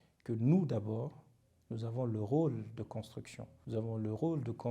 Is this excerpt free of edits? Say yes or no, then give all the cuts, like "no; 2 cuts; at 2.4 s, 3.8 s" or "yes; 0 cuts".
yes; 0 cuts